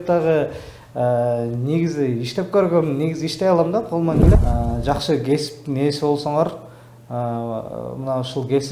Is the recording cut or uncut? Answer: cut